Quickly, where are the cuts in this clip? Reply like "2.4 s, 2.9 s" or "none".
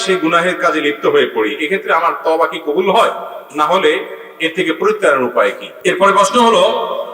5.7 s